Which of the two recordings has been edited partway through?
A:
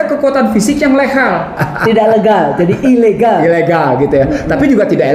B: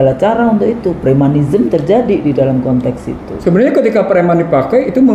A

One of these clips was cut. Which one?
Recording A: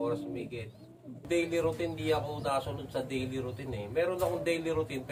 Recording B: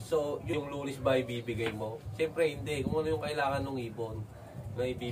A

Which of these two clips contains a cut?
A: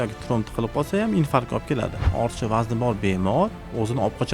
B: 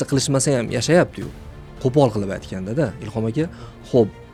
A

